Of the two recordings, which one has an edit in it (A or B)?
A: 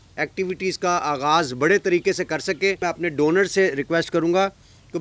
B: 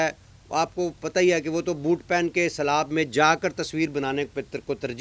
A